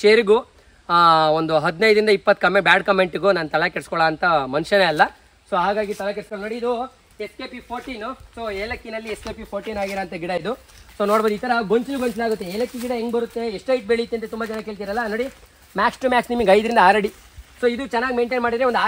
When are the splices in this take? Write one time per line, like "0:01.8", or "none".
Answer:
none